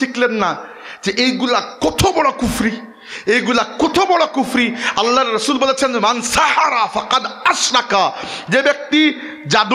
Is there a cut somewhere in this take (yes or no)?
no